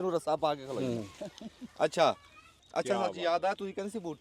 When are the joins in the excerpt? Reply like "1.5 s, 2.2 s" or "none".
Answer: 2.6 s

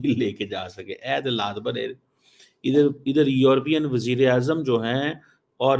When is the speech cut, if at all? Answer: none

